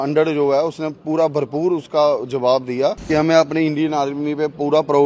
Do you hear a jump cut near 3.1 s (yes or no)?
yes